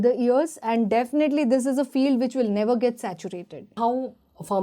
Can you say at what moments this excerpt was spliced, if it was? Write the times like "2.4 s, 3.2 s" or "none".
3.7 s